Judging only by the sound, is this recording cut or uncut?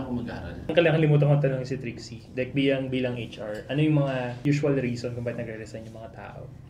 cut